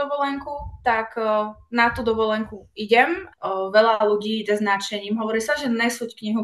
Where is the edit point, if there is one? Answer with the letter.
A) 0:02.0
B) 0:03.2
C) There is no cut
B